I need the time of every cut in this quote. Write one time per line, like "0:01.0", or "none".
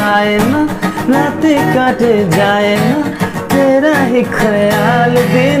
none

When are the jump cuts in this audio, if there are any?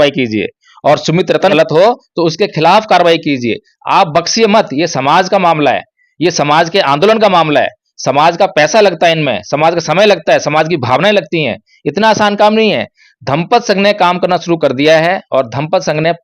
0:01.5

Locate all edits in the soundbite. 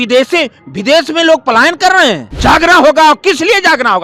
0:02.3

